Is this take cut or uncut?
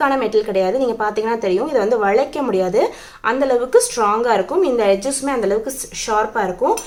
uncut